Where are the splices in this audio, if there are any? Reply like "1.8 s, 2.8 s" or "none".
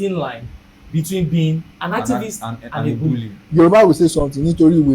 1.7 s, 3.3 s